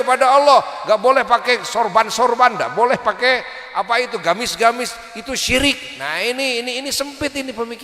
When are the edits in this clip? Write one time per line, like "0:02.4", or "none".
none